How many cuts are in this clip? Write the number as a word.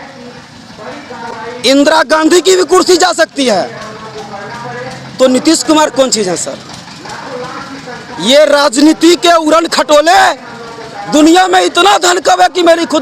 zero